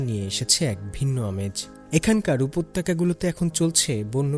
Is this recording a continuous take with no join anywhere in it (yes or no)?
yes